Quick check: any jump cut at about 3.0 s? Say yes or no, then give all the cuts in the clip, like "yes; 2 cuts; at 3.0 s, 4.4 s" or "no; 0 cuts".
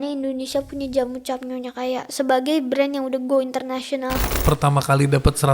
no; 1 cut; at 4.3 s